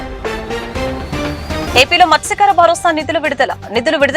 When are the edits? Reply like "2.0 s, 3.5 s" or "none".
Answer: 1.6 s